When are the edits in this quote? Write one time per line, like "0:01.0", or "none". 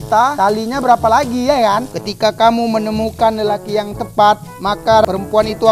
0:01.9